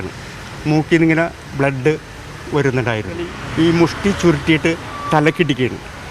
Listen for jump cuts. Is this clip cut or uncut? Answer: cut